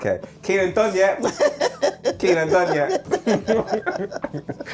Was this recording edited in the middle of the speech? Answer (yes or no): no